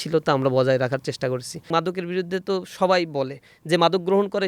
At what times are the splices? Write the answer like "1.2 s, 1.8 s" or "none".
1.7 s